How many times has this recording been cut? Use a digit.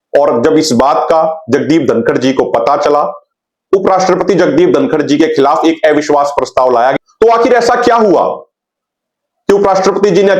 2